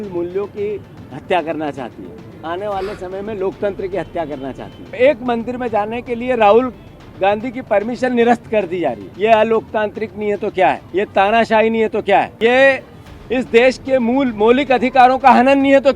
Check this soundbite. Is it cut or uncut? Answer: cut